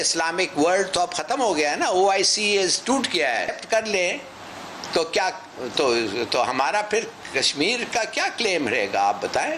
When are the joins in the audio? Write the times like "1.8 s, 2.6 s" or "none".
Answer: 3.5 s